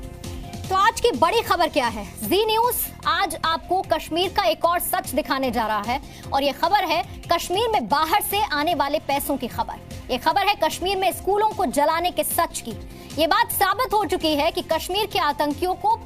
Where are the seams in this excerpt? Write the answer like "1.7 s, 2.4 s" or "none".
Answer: none